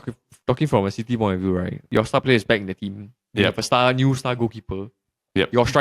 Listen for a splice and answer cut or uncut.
cut